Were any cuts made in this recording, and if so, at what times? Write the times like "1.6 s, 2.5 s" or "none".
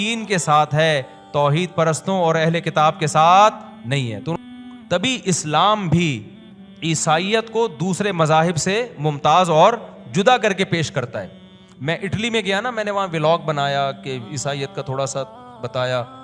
4.3 s